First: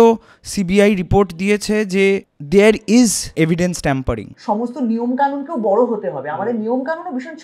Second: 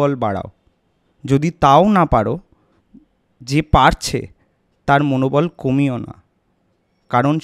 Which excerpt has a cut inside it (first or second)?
first